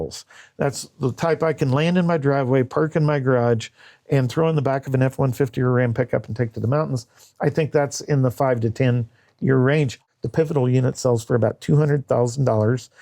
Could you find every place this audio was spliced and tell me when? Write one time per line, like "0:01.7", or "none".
0:10.0